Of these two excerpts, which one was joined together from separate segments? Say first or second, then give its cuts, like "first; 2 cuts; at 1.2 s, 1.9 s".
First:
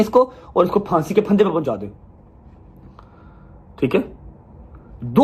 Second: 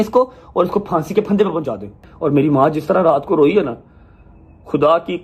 second; 1 cut; at 2.1 s